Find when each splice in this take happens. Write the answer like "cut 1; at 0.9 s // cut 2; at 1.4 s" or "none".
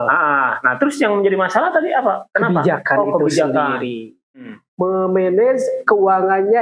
cut 1; at 4.4 s